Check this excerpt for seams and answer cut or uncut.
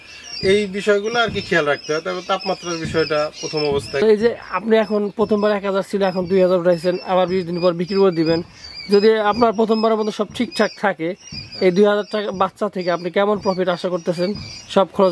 cut